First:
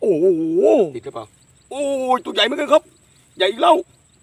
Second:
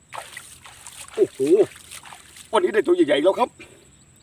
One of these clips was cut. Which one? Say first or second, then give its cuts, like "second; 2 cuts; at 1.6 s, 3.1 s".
first; 1 cut; at 1.0 s